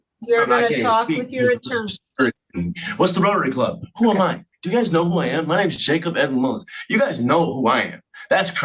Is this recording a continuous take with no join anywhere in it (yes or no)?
yes